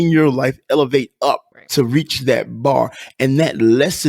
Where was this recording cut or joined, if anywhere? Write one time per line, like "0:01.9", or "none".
0:01.5